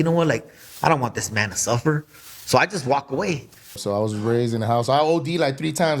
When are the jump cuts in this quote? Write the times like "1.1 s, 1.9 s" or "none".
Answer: 3.8 s